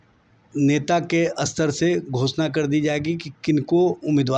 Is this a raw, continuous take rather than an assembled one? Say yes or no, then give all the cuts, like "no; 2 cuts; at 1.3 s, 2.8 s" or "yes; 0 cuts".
yes; 0 cuts